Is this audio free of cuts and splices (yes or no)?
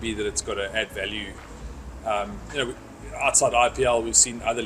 yes